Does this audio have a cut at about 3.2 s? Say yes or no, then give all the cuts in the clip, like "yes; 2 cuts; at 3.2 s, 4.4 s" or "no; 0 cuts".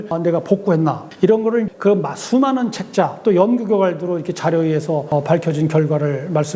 no; 0 cuts